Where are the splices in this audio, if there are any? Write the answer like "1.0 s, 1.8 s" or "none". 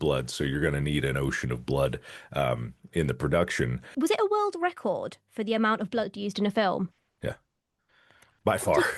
3.8 s, 7.0 s